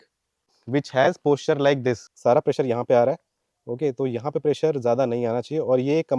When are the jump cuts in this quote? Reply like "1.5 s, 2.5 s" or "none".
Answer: 2.1 s